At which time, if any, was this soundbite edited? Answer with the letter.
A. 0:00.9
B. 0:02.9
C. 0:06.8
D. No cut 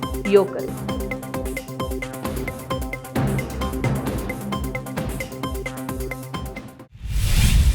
C